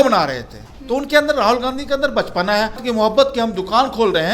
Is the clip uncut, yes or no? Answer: no